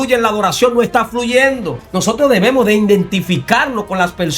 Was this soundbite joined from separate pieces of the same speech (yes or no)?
yes